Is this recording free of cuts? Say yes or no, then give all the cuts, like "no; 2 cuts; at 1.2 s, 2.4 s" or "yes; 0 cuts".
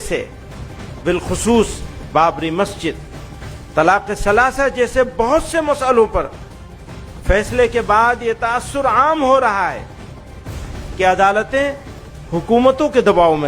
yes; 0 cuts